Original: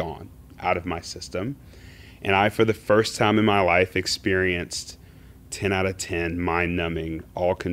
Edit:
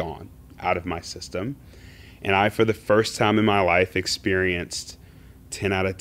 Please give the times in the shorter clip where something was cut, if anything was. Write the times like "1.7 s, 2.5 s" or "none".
none